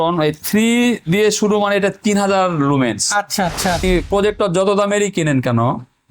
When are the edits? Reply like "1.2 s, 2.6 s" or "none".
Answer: 3.8 s